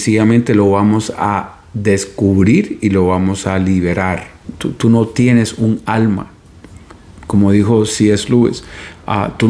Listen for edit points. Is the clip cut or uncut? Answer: cut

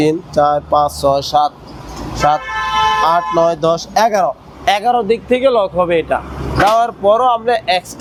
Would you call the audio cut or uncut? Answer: uncut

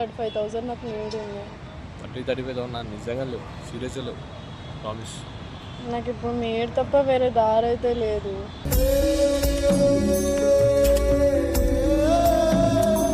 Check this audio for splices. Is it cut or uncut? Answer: uncut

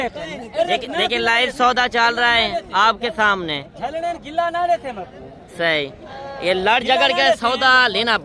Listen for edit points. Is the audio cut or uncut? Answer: uncut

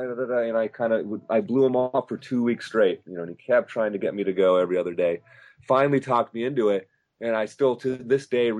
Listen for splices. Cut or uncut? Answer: uncut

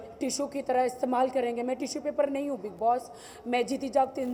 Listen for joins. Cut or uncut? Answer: uncut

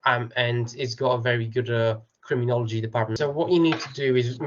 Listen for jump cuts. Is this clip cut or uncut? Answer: cut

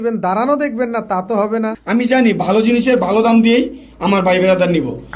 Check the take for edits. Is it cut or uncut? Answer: cut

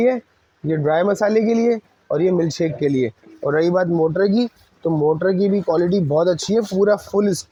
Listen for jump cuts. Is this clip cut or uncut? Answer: uncut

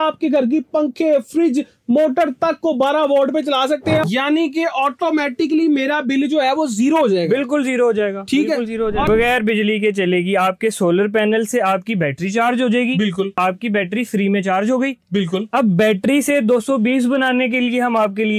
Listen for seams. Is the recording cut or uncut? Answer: cut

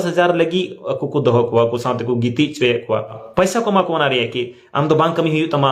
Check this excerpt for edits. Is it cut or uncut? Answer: cut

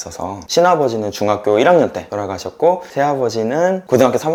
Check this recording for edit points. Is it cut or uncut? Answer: uncut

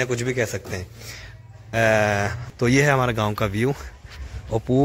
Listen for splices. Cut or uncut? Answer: cut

